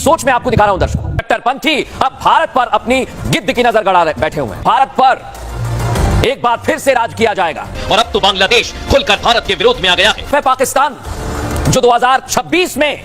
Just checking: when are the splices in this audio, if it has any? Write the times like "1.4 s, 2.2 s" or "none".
1.2 s, 4.6 s, 7.7 s, 10.3 s